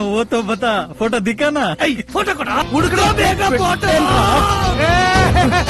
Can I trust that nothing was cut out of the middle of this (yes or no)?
no